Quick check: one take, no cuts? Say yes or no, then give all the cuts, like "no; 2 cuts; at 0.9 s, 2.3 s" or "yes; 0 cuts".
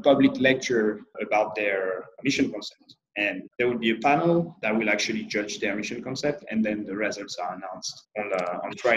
no; 5 cuts; at 1.2 s, 2.1 s, 3.5 s, 4.6 s, 8.0 s